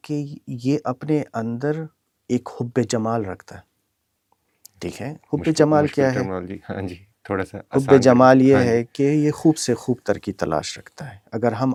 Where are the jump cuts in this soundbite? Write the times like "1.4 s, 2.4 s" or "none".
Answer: none